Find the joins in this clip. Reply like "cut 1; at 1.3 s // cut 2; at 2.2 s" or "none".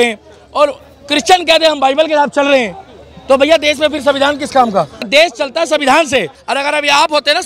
cut 1; at 5.1 s // cut 2; at 6.4 s